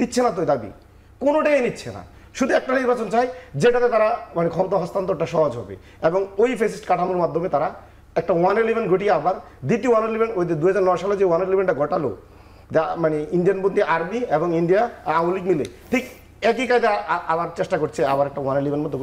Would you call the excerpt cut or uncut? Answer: uncut